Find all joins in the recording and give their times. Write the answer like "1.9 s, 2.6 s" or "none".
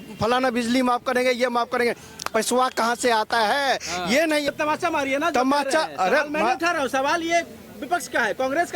4.5 s